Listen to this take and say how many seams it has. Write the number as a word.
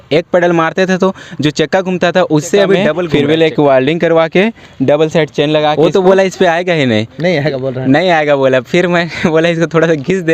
two